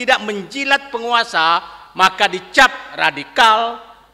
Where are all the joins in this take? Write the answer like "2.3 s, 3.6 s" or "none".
none